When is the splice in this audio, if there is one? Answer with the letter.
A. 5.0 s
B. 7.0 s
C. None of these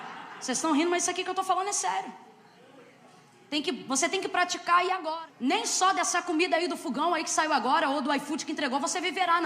A